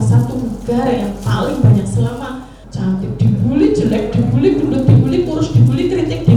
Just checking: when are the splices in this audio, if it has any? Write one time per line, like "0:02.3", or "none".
0:02.6

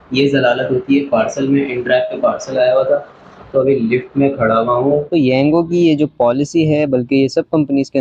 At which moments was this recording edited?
0:05.1

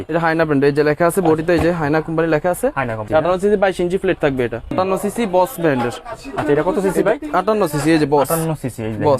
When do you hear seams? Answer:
0:03.0
0:04.7

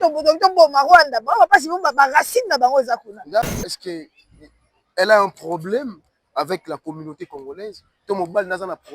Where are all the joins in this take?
0:03.5

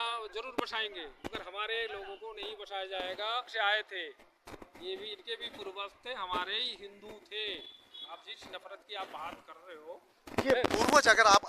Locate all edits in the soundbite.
0:03.5

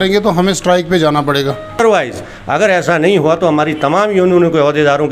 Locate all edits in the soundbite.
0:01.8

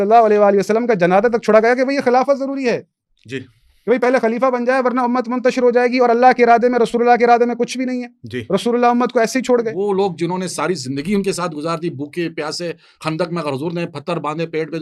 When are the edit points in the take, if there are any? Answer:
0:09.8

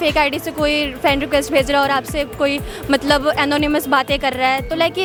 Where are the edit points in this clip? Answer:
none

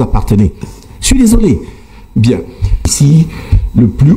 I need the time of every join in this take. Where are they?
0:02.8

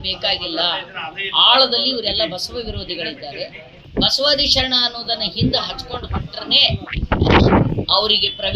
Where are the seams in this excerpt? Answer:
0:03.9

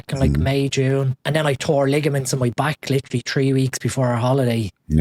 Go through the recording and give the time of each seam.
0:01.2

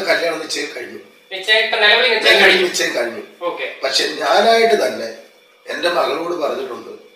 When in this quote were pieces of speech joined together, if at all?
none

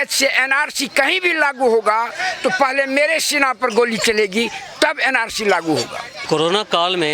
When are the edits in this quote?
0:06.1

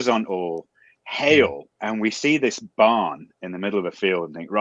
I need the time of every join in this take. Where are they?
0:01.7

